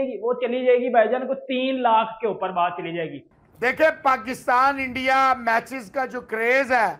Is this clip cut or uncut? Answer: cut